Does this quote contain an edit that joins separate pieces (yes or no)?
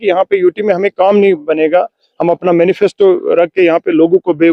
no